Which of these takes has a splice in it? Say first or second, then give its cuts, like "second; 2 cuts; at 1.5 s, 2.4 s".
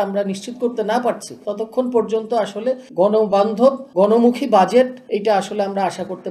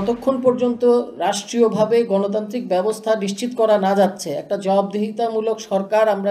first; 4 cuts; at 1.4 s, 2.8 s, 3.8 s, 5.0 s